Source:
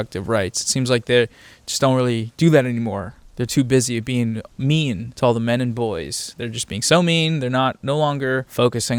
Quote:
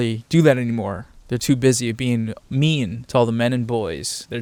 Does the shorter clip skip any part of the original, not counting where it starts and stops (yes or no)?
no